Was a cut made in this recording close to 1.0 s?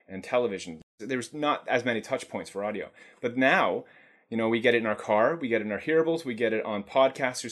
yes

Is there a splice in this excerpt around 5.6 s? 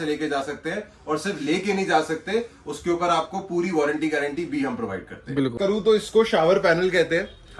yes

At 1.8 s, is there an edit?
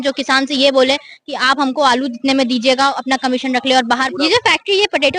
no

